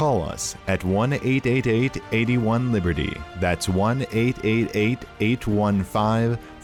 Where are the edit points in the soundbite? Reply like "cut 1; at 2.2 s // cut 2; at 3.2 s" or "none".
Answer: none

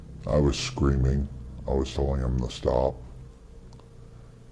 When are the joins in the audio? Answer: none

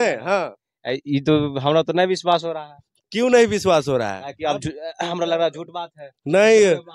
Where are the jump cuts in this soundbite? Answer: none

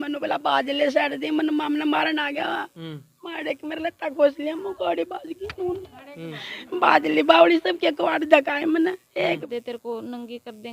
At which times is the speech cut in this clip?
cut 1; at 9.4 s

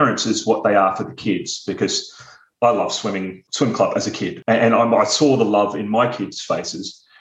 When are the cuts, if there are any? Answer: cut 1; at 2.5 s // cut 2; at 3.4 s // cut 3; at 4.4 s

